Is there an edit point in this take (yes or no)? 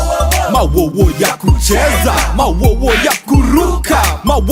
no